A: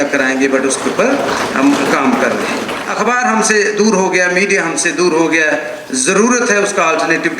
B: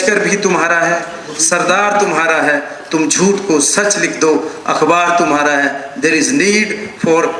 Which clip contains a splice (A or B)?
A